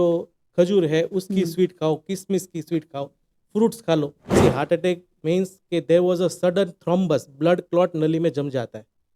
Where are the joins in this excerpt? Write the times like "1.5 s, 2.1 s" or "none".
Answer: 4.2 s

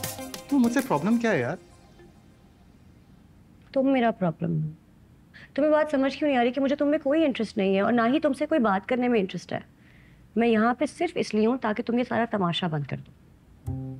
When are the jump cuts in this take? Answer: none

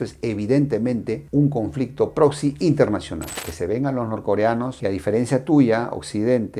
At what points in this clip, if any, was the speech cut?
3.2 s

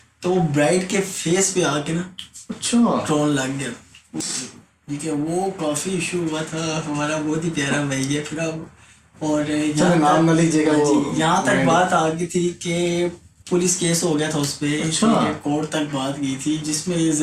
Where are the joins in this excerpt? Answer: none

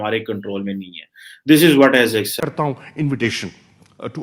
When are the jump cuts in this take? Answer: 2.4 s

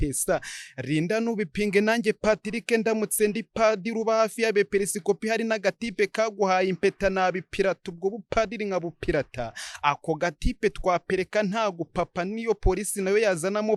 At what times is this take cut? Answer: none

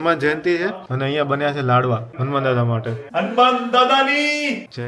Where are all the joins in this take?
3.0 s

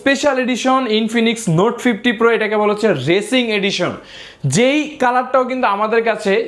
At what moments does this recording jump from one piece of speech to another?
none

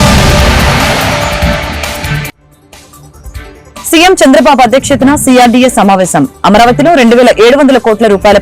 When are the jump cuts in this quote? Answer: 3.9 s

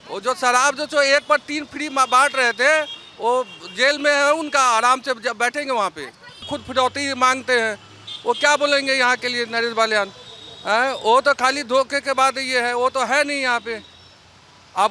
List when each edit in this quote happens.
6.3 s

